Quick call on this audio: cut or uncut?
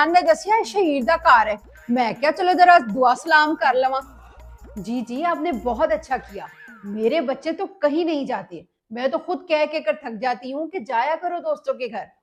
uncut